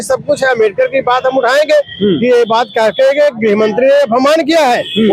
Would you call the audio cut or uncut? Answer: uncut